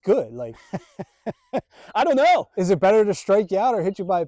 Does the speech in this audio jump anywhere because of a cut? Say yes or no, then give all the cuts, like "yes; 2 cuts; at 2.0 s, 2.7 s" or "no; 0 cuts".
no; 0 cuts